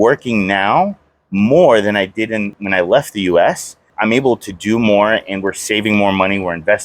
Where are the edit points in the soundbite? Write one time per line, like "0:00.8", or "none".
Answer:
0:02.5
0:03.9